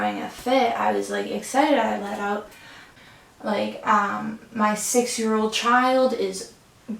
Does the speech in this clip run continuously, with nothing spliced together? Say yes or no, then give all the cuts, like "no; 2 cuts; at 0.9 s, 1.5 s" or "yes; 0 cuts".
no; 1 cut; at 2.9 s